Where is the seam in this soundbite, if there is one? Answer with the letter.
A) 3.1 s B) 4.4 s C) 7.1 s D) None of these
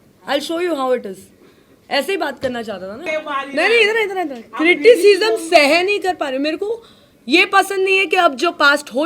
A